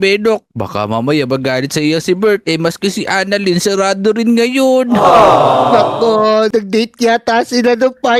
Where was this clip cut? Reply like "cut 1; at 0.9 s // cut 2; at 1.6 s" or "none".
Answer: none